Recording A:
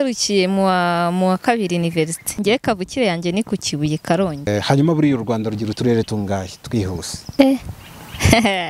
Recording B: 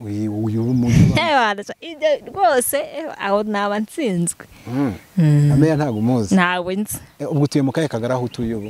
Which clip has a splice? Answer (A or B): A